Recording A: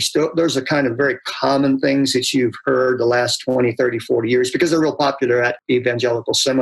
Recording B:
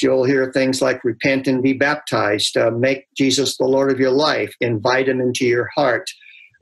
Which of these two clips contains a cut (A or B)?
A